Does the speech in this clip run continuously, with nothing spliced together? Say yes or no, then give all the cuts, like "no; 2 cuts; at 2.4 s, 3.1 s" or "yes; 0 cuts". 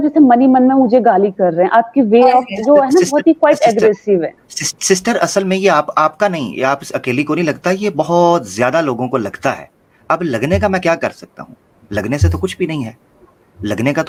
yes; 0 cuts